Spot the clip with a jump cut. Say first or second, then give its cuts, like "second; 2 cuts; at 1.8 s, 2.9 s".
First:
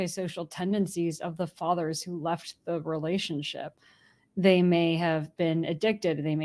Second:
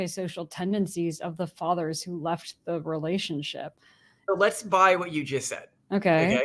second; 1 cut; at 4.1 s